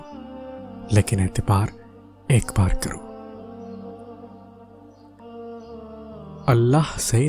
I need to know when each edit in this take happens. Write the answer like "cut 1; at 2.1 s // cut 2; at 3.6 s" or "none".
cut 1; at 3.0 s // cut 2; at 6.4 s